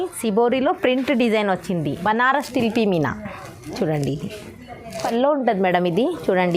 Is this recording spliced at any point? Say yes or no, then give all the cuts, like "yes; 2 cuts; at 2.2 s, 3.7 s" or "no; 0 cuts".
yes; 2 cuts; at 2.0 s, 5.0 s